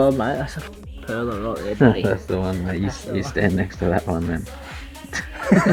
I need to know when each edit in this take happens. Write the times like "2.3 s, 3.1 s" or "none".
none

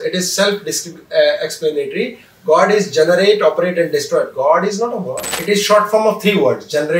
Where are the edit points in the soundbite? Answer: 5.3 s

